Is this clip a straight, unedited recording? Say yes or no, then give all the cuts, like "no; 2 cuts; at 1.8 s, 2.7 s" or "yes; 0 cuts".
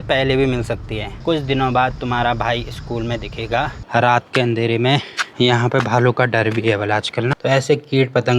no; 3 cuts; at 1.1 s, 3.8 s, 7.3 s